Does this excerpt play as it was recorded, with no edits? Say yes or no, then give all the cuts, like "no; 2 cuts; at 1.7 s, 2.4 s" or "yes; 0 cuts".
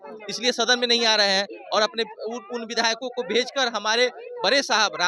yes; 0 cuts